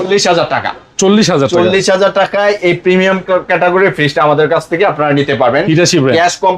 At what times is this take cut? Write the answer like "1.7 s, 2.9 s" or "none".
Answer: none